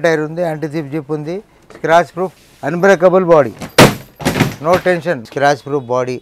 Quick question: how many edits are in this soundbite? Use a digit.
1